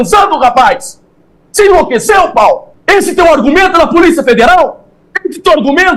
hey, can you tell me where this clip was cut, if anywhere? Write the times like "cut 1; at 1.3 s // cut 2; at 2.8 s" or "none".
cut 1; at 2.7 s